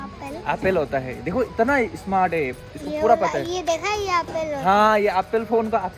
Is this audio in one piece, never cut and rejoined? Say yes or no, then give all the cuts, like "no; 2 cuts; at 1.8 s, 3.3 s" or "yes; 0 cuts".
yes; 0 cuts